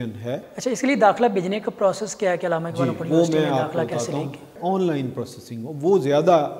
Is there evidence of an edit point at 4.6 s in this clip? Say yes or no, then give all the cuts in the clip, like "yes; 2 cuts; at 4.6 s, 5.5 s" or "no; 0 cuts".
yes; 1 cut; at 4.6 s